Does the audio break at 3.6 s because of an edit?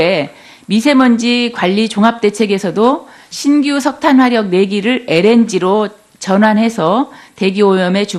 yes; 1 cut; at 3.6 s

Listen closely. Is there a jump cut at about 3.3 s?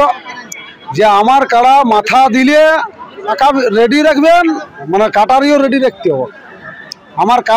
yes; 2 cuts; at 3.3 s, 4.7 s

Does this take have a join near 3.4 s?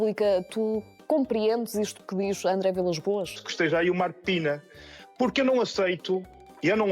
yes; 1 cut; at 3.4 s

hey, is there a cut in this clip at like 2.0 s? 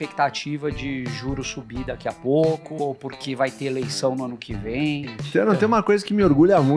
no; 1 cut; at 5.1 s

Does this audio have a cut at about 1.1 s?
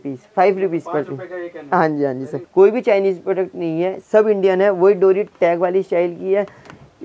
no; 1 cut; at 2.4 s

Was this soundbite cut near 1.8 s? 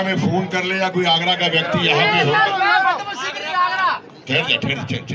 no; 0 cuts

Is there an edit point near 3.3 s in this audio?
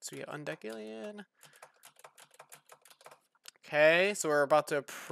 yes; 1 cut; at 3.3 s

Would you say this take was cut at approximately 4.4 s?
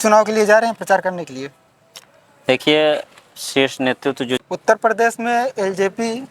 yes; 1 cut; at 4.4 s

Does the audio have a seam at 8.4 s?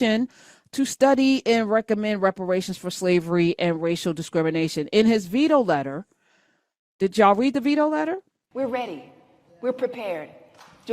yes; 1 cut; at 8.4 s

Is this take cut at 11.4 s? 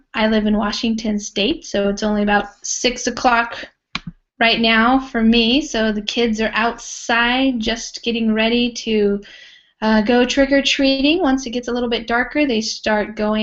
no; 0 cuts

